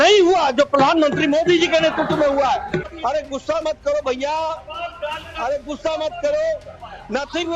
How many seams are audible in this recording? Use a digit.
1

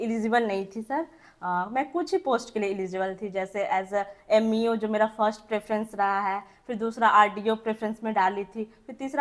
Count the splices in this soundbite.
0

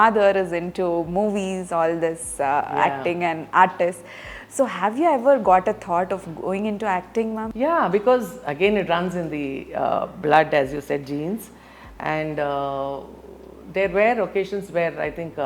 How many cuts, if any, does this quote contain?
1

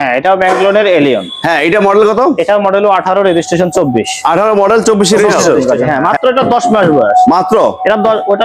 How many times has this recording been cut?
1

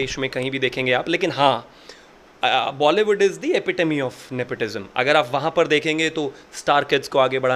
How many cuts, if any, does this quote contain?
0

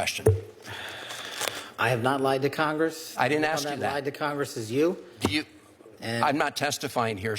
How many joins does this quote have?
0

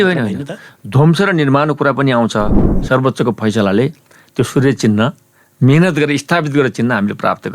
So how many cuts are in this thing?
1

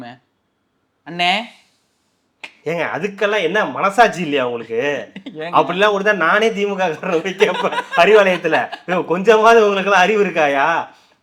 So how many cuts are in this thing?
0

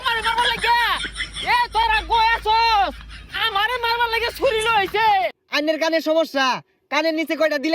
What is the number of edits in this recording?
1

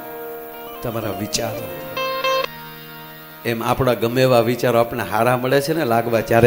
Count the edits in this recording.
1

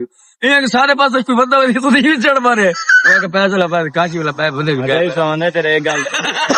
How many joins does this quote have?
0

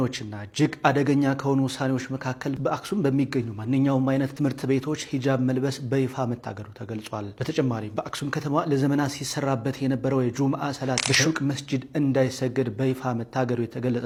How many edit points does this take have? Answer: 0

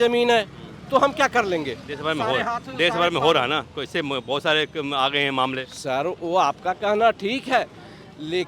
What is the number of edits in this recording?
0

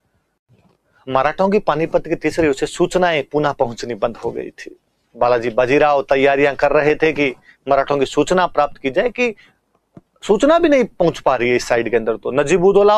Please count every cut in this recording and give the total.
0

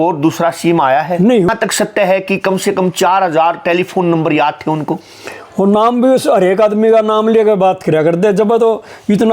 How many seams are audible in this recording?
1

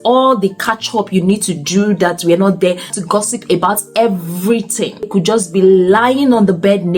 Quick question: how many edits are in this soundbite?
2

